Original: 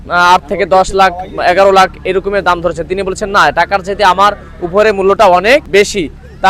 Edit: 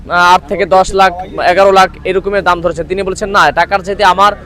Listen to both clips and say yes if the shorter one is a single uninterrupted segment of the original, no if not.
yes